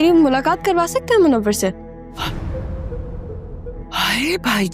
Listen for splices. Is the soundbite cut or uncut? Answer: cut